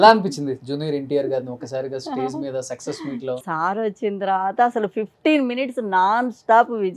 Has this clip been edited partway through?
yes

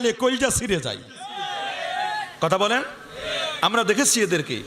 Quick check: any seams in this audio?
no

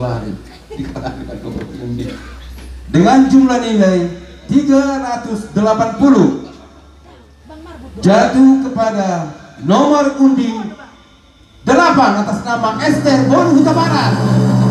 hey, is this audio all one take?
yes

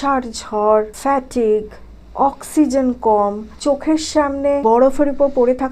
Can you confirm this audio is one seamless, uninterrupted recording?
no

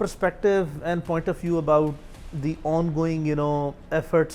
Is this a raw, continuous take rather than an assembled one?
yes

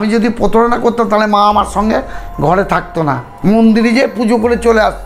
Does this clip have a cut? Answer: yes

